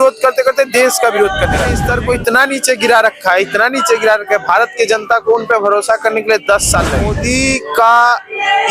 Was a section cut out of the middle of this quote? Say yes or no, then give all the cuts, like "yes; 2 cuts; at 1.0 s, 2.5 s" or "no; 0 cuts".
yes; 2 cuts; at 1.8 s, 7.1 s